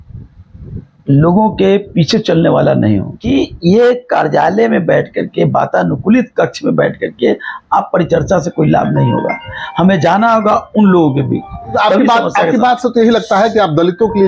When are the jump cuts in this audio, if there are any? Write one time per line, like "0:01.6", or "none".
0:03.1
0:11.7